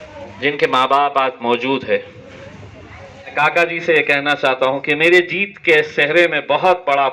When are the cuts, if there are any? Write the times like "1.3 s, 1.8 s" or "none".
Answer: 3.3 s